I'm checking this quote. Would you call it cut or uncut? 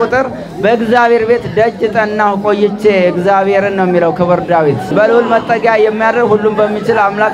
cut